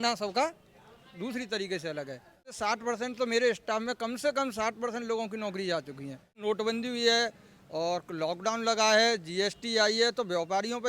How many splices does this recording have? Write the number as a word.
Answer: two